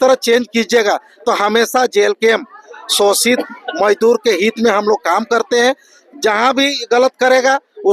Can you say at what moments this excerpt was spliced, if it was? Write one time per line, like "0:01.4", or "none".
none